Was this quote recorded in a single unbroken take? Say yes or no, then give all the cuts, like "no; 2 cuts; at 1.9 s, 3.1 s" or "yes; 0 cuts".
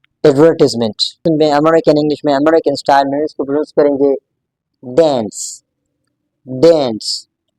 no; 1 cut; at 1.2 s